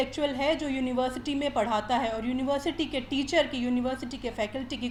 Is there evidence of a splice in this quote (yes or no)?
no